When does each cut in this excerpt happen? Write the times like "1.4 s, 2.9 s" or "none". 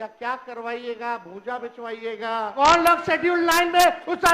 2.5 s